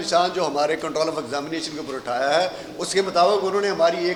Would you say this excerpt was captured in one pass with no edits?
yes; 0 cuts

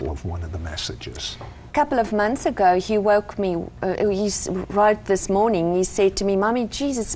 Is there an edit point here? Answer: yes; 1 cut; at 1.5 s

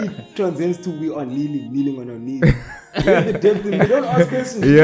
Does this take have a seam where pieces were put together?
yes; 1 cut; at 3.9 s

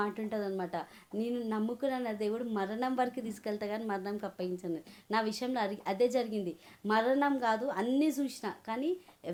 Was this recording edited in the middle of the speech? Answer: no; 0 cuts

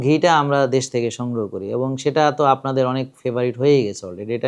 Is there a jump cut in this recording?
no; 0 cuts

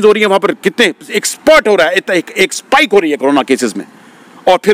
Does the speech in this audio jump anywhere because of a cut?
no; 0 cuts

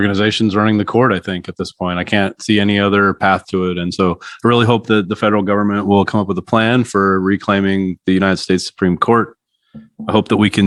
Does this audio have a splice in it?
no; 0 cuts

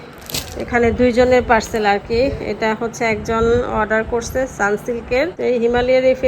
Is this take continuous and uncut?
no; 1 cut; at 5.3 s

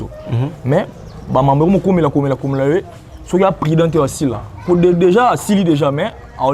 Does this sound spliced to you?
no; 0 cuts

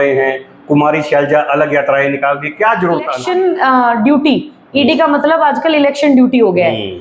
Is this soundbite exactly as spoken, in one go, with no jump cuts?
no; 1 cut; at 3.1 s

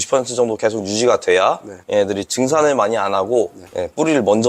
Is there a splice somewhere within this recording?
no; 0 cuts

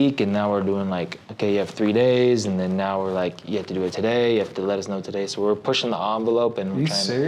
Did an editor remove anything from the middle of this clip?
no; 0 cuts

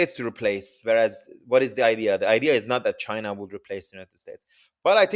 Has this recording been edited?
no; 0 cuts

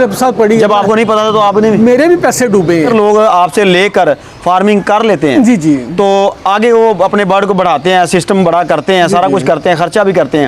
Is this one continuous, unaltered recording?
no; 1 cut; at 2.9 s

